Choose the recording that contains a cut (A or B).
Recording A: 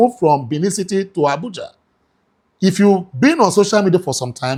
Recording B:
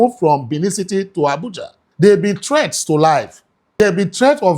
B